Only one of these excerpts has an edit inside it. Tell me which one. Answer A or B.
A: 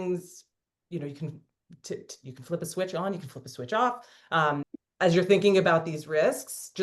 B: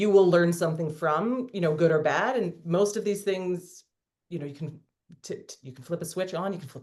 A